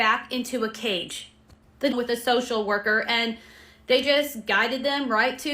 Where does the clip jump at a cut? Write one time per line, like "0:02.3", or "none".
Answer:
0:01.9

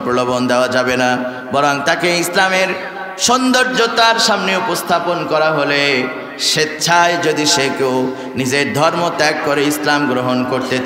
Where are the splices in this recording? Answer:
none

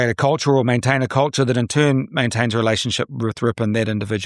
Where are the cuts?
none

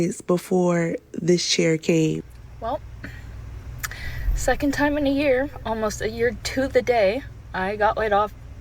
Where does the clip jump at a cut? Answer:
0:02.3

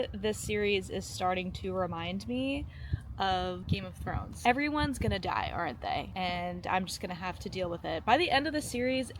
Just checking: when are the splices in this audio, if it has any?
0:03.6
0:06.1

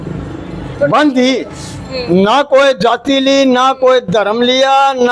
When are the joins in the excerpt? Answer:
none

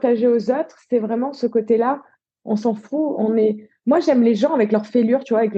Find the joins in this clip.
none

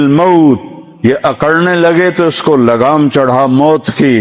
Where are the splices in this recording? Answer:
none

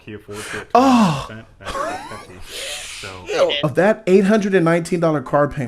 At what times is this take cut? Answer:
0:03.6

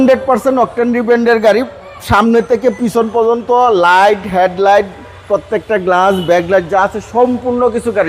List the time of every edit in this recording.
none

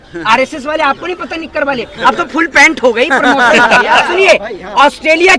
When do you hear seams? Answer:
0:04.0

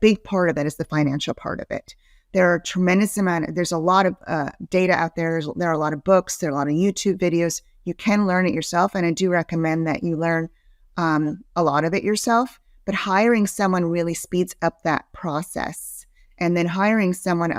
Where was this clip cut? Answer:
none

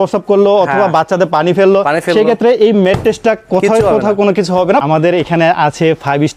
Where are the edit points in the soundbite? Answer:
0:04.8

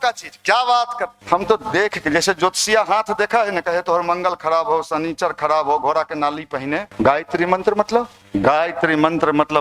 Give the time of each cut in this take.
0:01.1
0:06.9
0:08.2

